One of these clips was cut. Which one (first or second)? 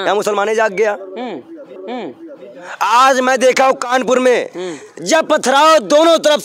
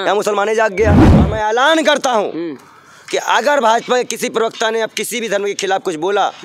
second